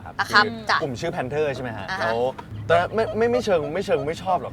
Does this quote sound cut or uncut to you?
cut